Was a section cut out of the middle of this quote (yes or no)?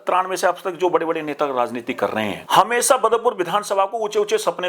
yes